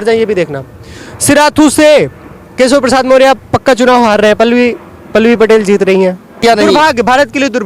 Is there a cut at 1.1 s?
no; 1 cut; at 6.4 s

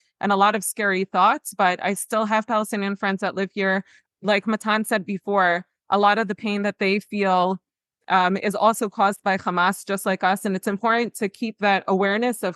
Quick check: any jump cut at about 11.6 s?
no; 0 cuts

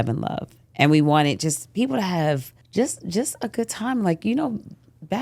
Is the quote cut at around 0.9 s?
no; 1 cut; at 2.6 s

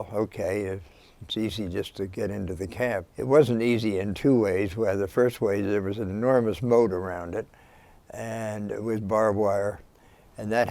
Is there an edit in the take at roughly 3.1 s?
yes; 1 cut; at 3.1 s

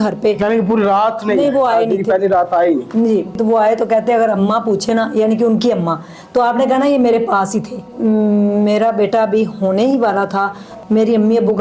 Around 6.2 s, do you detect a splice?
no; 3 cuts; at 3.4 s, 7.9 s, 10.7 s

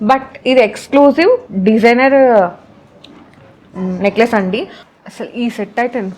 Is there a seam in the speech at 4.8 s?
yes; 1 cut; at 4.8 s

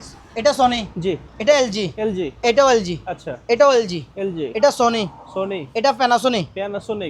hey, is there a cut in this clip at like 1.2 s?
no; 0 cuts

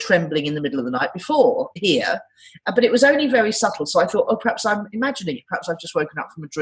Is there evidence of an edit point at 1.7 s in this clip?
yes; 1 cut; at 1.7 s

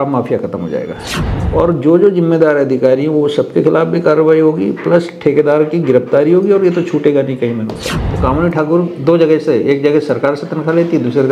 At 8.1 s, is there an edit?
yes; 2 cuts; at 1.1 s, 8.1 s

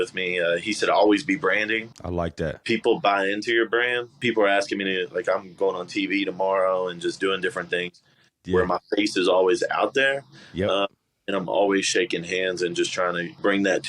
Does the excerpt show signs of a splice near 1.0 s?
no; 2 cuts; at 2.3 s, 4.2 s

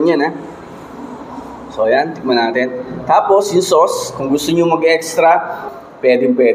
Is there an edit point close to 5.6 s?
yes; 1 cut; at 5.6 s

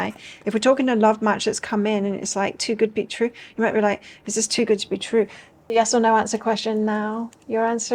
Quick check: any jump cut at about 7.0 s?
no; 1 cut; at 5.7 s

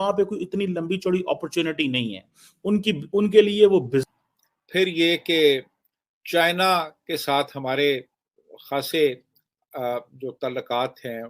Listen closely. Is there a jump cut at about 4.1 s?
yes; 1 cut; at 4.1 s

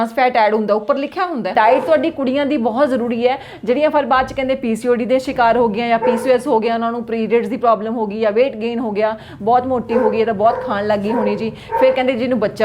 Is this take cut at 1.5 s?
yes; 1 cut; at 1.5 s

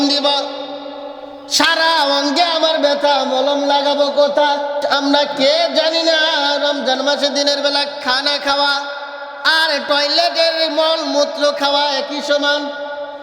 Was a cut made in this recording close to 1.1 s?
no; 1 cut; at 4.8 s

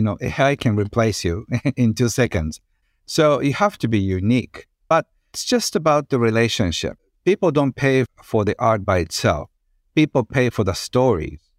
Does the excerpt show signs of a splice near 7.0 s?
yes; 2 cuts; at 5.4 s, 7.0 s

